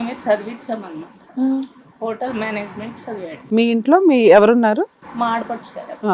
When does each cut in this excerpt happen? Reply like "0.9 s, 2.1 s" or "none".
3.4 s, 5.0 s